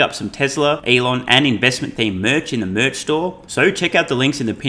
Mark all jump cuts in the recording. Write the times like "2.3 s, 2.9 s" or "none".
0.8 s, 3.4 s